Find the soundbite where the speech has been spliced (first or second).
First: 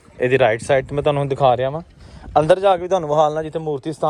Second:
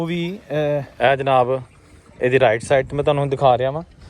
second